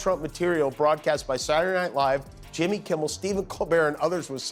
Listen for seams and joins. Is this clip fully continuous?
yes; 0 cuts

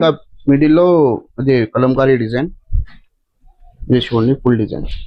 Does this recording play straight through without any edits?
yes; 0 cuts

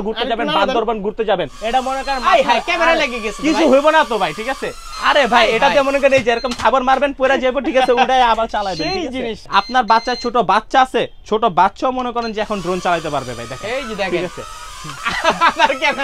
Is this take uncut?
no; 2 cuts; at 1.6 s, 9.4 s

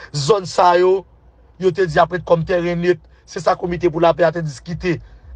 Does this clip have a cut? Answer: no; 0 cuts

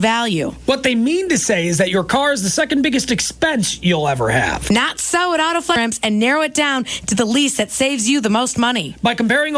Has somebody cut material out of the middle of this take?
yes; 1 cut; at 5.8 s

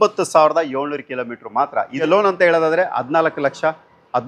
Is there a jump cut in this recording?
yes; 1 cut; at 2.0 s

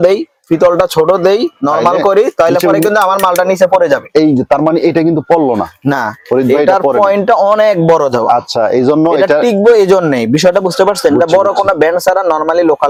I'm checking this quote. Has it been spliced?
no; 0 cuts

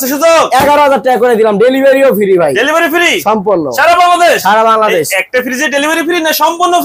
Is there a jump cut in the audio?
no; 0 cuts

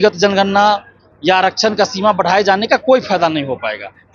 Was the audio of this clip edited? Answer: no; 0 cuts

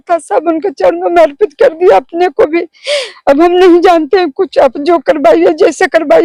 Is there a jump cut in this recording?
no; 0 cuts

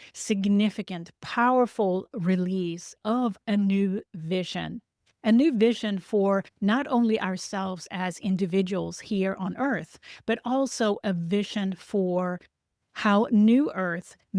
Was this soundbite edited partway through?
no; 0 cuts

